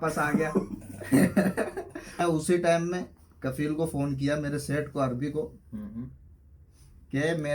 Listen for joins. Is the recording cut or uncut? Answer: cut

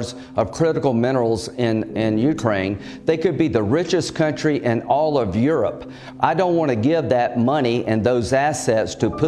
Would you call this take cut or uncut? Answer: cut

